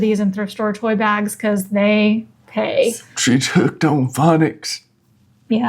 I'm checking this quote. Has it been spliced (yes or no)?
yes